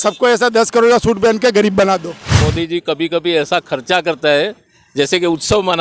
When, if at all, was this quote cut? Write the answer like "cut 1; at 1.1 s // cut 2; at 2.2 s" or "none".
cut 1; at 2.3 s